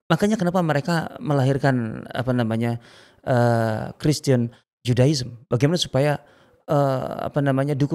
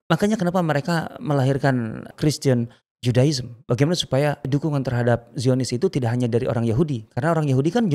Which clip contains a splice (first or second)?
second